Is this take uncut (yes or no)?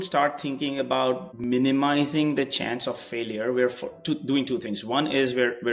no